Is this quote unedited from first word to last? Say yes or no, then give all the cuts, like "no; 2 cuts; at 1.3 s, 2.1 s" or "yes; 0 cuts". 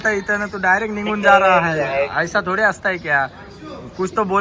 yes; 0 cuts